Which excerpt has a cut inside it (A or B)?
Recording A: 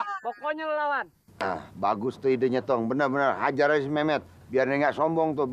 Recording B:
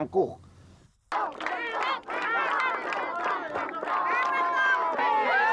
B